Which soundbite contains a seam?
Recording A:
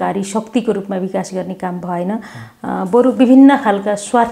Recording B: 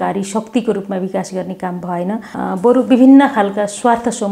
B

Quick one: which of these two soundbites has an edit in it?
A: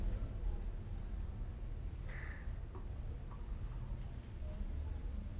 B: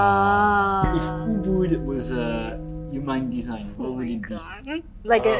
B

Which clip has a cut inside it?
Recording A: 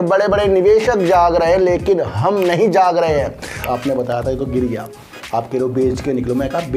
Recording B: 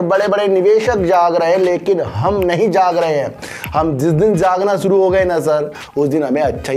A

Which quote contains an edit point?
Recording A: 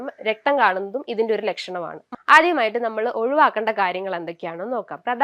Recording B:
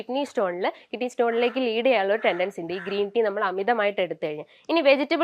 A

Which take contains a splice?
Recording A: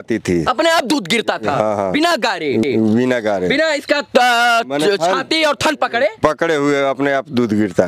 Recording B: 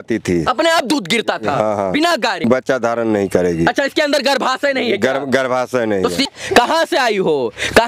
B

